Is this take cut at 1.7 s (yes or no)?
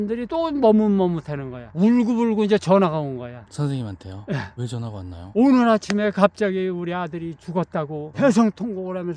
yes